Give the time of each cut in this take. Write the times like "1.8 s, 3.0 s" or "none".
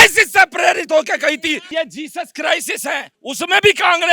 1.6 s, 3.2 s